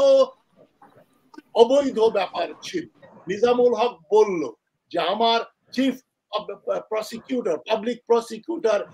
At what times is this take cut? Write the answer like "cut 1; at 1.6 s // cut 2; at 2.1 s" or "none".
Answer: cut 1; at 3.2 s